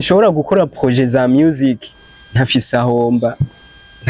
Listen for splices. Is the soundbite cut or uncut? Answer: uncut